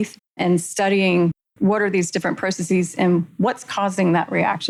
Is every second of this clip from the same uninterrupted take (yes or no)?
yes